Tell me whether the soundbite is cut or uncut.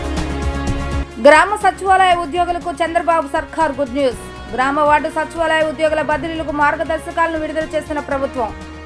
cut